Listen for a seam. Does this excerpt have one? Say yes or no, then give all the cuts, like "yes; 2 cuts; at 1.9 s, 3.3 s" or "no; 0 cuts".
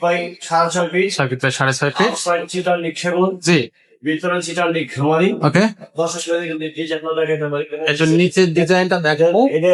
no; 0 cuts